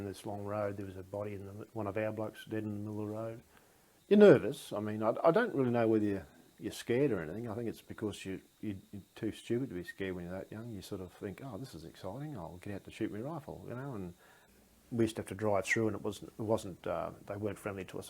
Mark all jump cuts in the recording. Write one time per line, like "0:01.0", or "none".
0:03.9
0:14.5